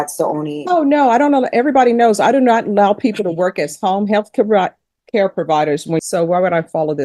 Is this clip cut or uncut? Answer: cut